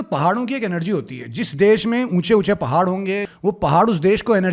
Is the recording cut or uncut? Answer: cut